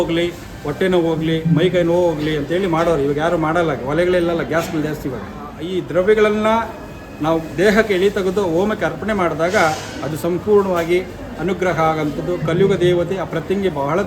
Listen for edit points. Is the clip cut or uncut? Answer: cut